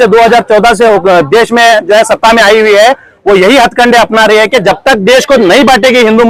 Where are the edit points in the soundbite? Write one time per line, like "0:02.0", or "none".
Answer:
none